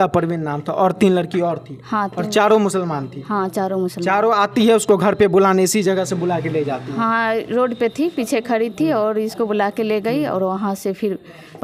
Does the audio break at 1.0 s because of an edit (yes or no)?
no